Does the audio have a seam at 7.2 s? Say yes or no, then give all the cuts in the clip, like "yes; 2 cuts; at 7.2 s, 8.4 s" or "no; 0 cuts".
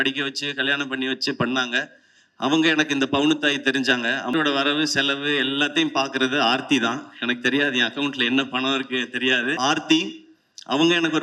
no; 2 cuts; at 4.3 s, 9.6 s